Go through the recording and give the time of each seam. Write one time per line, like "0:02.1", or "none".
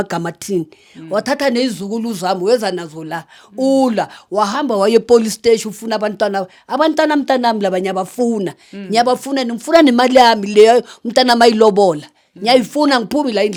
none